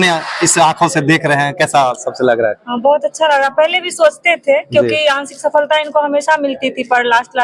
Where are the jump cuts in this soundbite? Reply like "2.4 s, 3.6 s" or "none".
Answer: none